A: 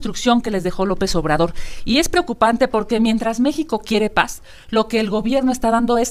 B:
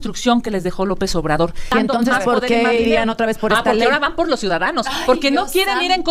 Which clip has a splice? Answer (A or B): B